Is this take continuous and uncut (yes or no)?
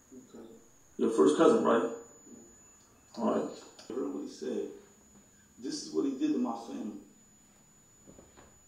no